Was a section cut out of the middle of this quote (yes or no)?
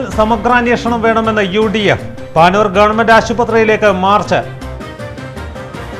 no